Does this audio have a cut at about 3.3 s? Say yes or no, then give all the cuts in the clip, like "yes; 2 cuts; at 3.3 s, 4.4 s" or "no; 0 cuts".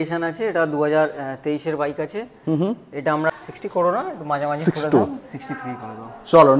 yes; 1 cut; at 3.3 s